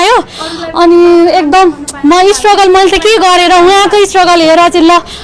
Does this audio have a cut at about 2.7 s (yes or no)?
no